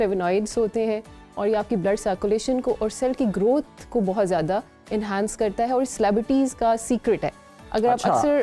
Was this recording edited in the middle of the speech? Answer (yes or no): no